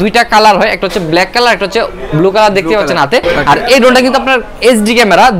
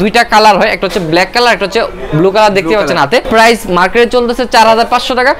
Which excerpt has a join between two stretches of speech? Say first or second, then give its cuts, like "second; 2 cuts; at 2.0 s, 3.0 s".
second; 1 cut; at 3.2 s